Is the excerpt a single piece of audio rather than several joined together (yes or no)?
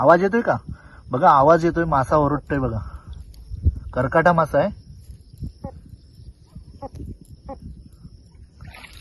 yes